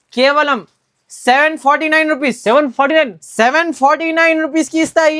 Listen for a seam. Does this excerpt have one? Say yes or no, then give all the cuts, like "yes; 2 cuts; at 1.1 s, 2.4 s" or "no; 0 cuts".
no; 0 cuts